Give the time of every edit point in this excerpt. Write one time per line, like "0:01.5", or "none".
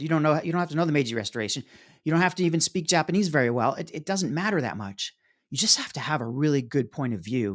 none

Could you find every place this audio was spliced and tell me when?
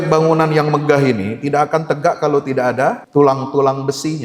0:03.0

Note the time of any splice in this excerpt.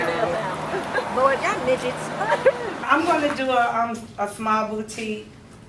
0:02.9

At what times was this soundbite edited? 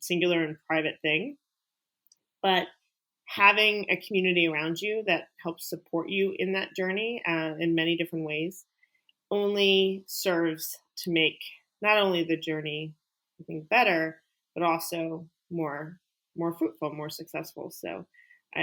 none

